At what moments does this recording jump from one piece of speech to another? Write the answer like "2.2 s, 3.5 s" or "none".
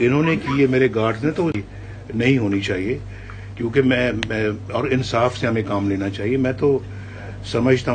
1.6 s